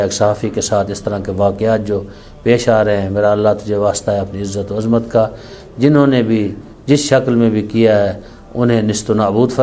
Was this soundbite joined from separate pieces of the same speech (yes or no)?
no